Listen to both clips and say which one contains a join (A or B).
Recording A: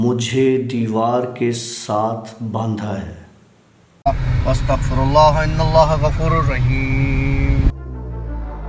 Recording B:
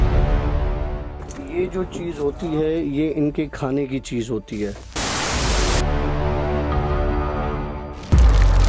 A